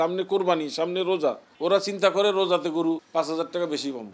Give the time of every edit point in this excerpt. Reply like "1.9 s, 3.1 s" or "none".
1.5 s, 3.1 s